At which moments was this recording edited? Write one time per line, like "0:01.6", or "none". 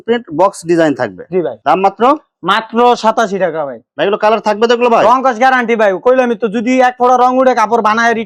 none